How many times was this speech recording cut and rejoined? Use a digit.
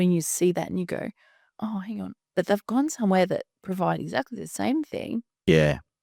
0